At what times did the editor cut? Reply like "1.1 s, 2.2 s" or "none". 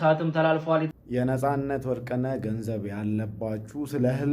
0.9 s